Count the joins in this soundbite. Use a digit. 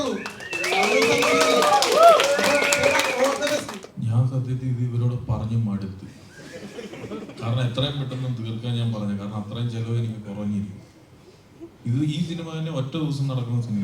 1